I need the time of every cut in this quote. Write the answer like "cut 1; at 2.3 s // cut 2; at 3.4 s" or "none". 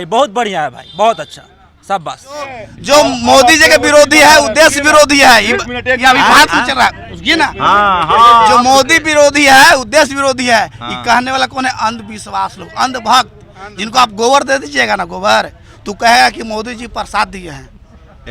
cut 1; at 2.7 s